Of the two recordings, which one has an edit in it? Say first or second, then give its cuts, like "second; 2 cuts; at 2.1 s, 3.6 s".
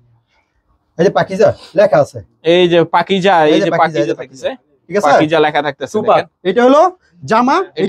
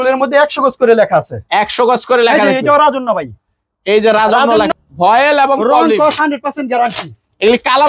second; 1 cut; at 4.7 s